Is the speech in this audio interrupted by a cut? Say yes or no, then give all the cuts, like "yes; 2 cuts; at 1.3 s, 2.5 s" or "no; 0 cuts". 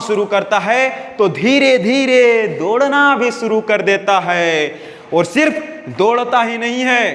no; 0 cuts